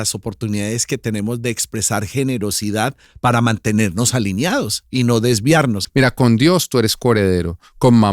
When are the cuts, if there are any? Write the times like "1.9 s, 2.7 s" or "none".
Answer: 5.8 s